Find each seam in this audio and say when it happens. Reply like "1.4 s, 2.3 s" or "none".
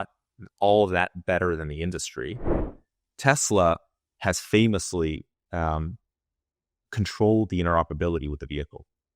2.7 s

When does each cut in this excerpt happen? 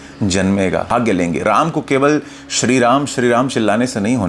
0.9 s

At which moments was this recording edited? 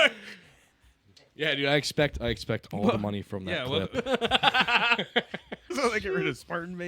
5.7 s

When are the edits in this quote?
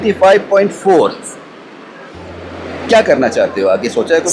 none

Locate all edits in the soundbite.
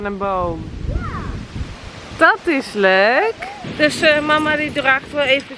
3.6 s

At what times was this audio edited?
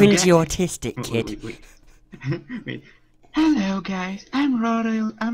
1.7 s

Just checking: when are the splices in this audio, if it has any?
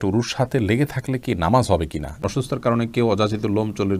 2.2 s

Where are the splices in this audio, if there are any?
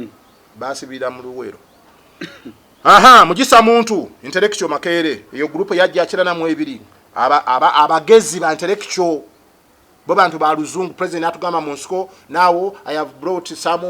none

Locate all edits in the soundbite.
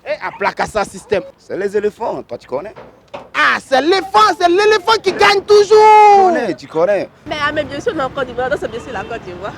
1.3 s, 7.2 s

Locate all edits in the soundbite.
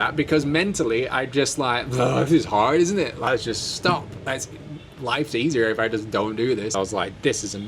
3.3 s, 6.7 s

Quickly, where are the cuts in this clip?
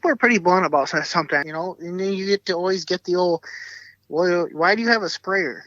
1.4 s

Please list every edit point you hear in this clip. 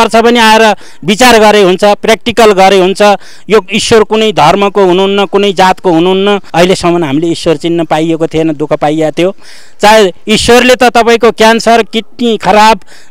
none

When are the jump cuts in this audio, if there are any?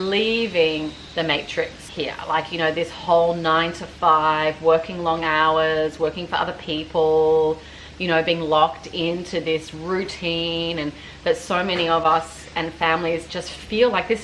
1.0 s, 1.8 s

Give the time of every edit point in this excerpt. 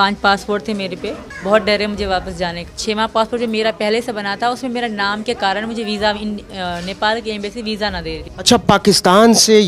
1.3 s, 2.7 s, 8.3 s

